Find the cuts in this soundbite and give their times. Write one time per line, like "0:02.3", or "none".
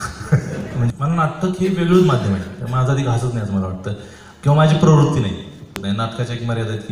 0:00.9
0:05.7